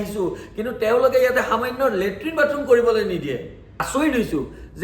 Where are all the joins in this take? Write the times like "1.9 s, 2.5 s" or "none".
3.9 s